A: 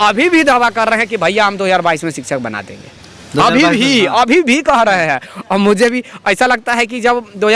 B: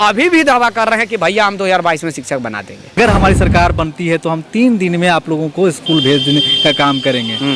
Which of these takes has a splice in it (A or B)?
B